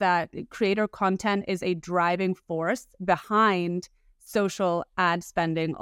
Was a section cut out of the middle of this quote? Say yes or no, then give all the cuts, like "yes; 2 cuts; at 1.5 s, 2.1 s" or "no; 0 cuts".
no; 0 cuts